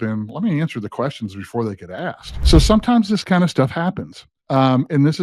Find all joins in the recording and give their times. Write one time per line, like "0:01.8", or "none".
0:02.3